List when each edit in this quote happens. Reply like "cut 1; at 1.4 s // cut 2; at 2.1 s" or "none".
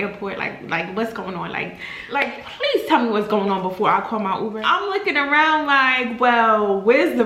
none